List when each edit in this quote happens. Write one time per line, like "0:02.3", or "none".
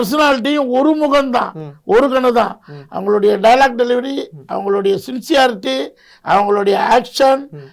none